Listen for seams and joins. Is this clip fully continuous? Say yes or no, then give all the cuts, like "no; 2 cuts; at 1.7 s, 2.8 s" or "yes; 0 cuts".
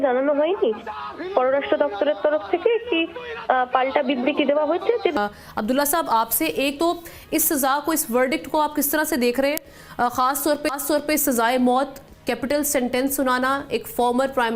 no; 1 cut; at 5.2 s